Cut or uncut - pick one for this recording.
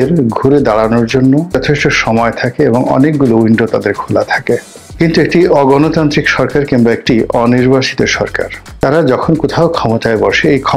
cut